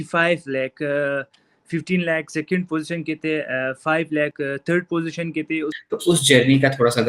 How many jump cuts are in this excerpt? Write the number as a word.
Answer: one